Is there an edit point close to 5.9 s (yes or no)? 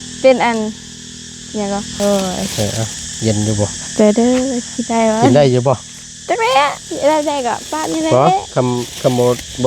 no